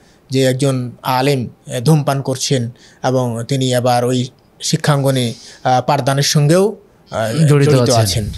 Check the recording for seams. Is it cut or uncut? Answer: uncut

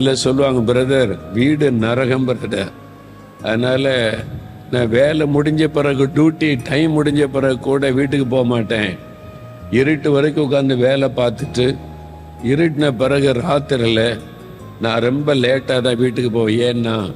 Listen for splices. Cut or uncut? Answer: uncut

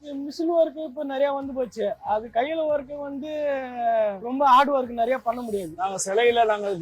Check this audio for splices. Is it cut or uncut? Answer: cut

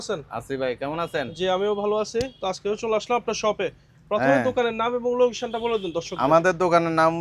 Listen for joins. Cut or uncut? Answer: uncut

